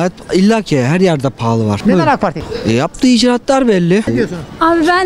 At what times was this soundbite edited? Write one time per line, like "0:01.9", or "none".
0:01.8
0:02.5
0:04.1